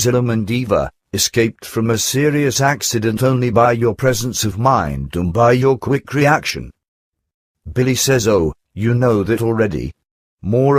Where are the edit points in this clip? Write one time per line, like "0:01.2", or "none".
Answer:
none